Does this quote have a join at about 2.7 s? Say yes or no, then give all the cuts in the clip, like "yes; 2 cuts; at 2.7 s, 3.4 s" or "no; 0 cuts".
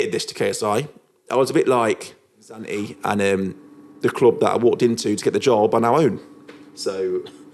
yes; 1 cut; at 2.7 s